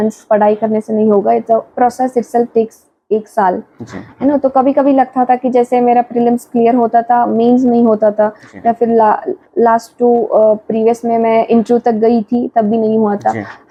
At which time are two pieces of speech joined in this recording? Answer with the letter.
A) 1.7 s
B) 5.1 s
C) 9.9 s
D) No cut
D